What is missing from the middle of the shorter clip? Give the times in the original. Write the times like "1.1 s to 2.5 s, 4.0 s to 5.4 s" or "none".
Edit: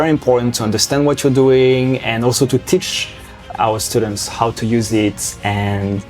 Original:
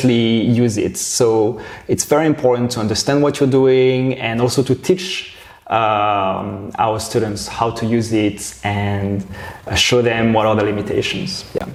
5.5 s to 6.6 s

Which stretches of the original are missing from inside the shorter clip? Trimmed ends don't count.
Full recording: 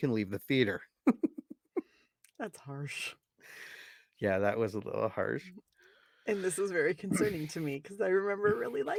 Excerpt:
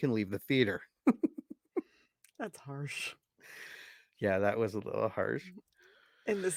none

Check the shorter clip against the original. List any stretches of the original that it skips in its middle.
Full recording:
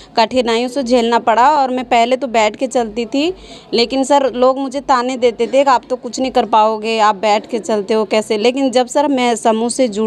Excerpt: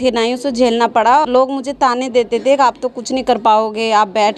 1.6 s to 4.3 s

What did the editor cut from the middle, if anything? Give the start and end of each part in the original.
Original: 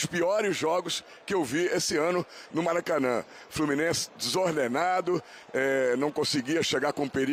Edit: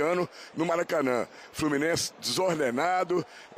none

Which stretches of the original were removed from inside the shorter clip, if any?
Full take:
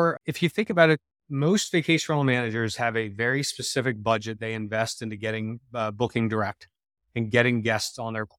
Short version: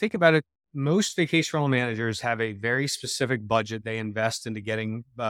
none

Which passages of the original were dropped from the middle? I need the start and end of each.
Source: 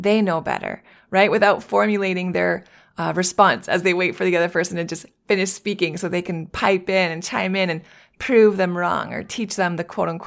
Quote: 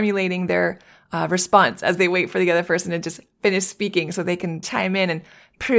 6.5 s to 7.2 s

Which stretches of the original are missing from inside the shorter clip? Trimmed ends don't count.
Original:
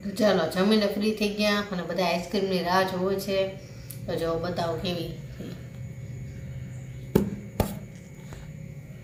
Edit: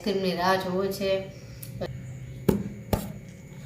4.1 s to 6.5 s

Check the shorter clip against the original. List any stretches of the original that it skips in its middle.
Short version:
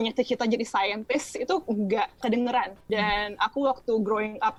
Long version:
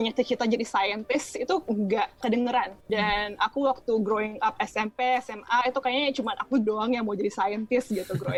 none

